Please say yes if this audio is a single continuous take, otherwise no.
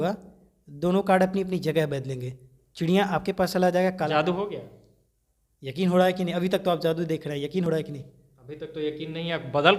yes